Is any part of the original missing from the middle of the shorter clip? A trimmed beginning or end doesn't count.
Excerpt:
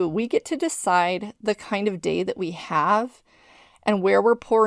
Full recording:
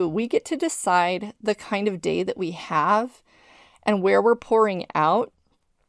no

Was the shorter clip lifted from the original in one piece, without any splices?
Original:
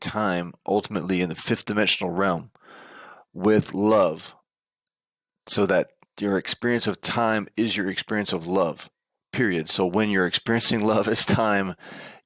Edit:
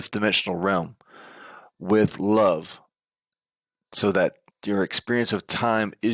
yes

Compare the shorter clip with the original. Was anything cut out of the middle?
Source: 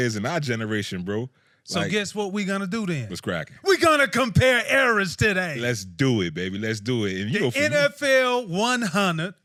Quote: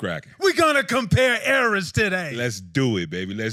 no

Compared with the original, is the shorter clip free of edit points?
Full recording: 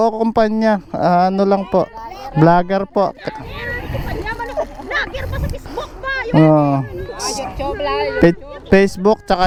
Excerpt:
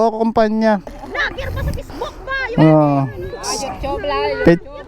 no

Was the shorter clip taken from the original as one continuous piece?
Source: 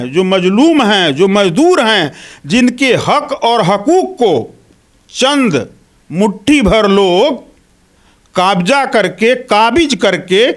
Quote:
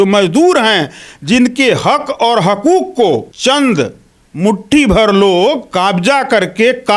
no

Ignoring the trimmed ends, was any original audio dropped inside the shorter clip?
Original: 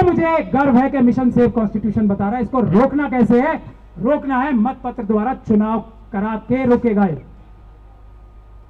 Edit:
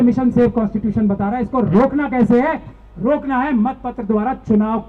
no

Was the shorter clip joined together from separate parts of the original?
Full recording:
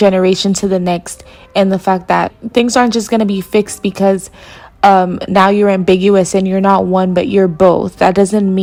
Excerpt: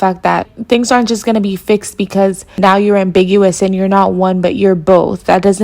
yes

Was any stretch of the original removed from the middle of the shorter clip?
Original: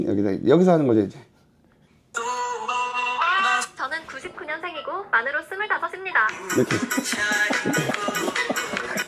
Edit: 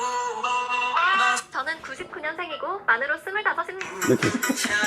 yes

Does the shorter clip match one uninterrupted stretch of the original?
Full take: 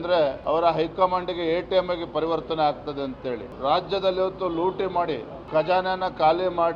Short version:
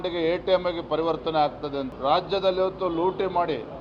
no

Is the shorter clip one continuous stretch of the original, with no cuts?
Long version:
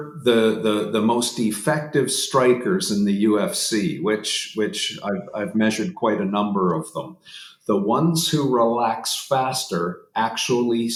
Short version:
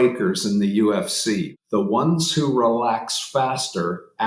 no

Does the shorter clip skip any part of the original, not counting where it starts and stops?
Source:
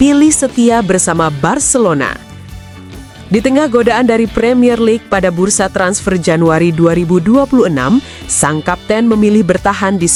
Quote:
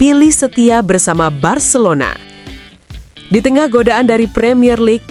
no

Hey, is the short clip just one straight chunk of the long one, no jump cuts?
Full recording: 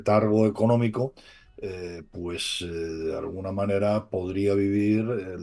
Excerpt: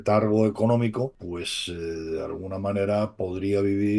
no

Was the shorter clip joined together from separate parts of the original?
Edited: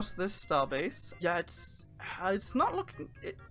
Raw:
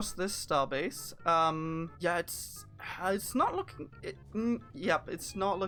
yes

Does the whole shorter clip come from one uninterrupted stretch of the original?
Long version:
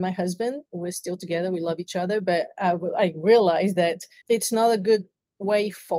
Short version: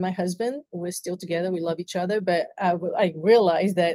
yes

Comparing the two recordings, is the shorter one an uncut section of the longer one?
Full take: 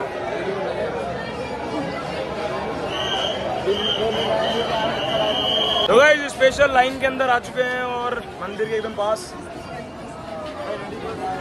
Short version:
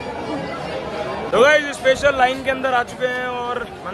no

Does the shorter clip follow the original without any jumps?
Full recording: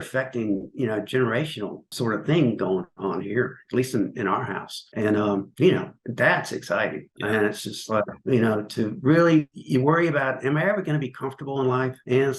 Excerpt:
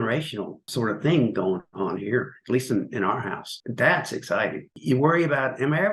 no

